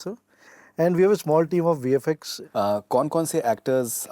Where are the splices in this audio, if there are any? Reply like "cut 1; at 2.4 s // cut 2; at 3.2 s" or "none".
cut 1; at 2.3 s